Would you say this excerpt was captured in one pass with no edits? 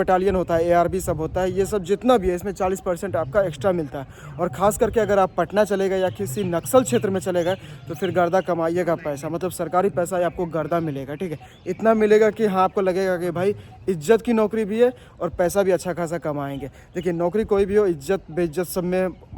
yes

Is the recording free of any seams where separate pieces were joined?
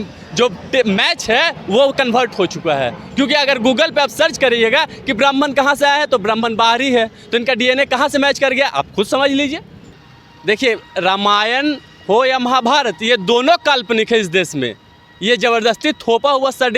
no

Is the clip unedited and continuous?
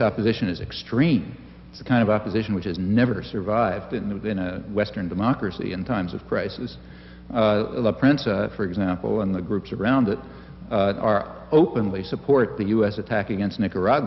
yes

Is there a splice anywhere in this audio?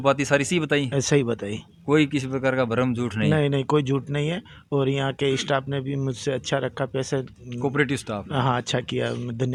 no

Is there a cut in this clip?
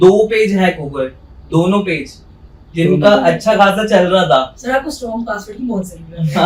no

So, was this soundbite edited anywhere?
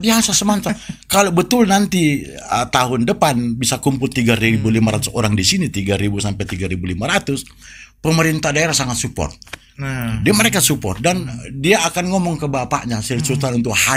no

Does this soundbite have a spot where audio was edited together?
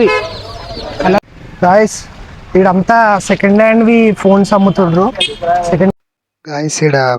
yes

